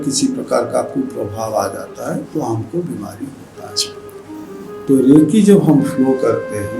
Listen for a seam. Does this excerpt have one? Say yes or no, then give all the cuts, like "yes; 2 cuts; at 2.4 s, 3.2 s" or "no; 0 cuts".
no; 0 cuts